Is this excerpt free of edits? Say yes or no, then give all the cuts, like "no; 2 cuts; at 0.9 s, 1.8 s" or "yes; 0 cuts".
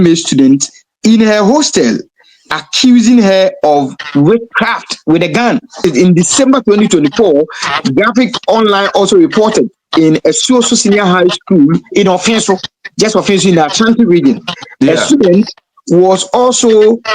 no; 1 cut; at 5.8 s